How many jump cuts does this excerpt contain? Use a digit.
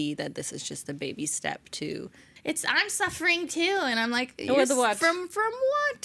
1